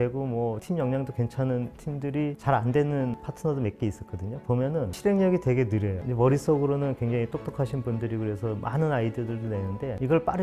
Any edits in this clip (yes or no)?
no